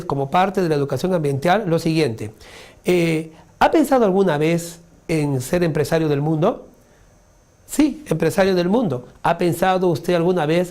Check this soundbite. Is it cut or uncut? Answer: cut